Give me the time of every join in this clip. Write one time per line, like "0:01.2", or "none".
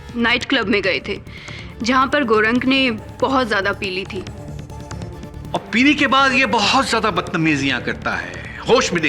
none